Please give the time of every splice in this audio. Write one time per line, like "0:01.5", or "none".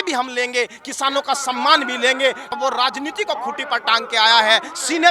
0:02.6